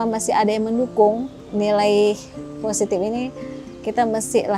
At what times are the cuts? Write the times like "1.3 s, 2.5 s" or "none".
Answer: 1.4 s